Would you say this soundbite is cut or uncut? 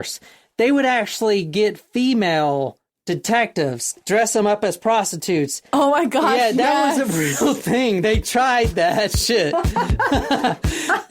cut